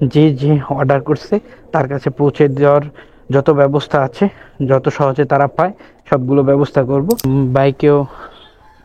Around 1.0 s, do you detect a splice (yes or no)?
no